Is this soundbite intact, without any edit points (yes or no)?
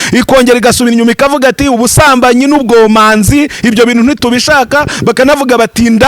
yes